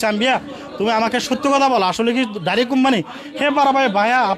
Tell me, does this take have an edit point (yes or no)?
no